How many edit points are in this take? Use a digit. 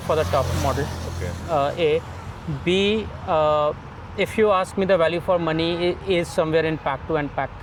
0